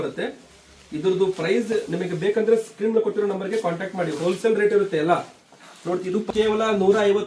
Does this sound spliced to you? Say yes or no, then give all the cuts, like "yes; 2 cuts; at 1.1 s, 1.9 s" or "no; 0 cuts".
yes; 1 cut; at 6.3 s